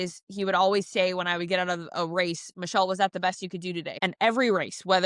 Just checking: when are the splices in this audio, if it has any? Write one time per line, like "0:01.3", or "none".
0:03.9